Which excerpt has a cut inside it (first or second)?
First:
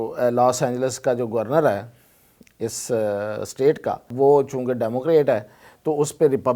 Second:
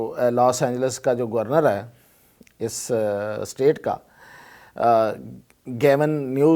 first